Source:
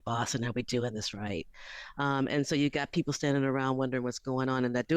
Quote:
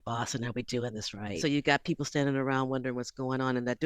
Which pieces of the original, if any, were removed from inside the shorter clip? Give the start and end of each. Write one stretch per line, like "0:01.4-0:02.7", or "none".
0:01.4-0:02.5